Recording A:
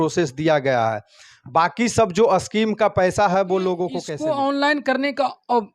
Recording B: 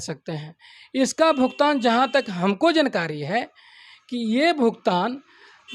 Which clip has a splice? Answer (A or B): A